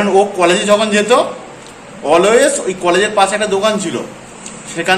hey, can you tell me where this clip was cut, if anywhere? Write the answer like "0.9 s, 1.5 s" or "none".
none